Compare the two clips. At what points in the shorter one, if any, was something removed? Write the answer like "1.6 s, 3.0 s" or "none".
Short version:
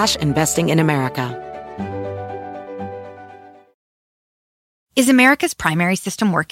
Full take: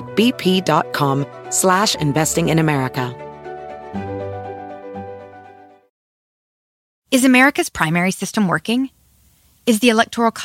1.3 s